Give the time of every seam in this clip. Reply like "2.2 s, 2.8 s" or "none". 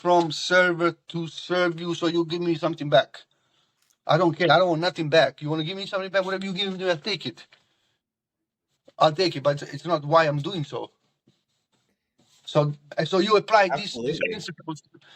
9.6 s, 12.9 s